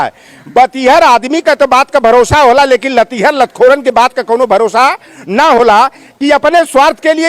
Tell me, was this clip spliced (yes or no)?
no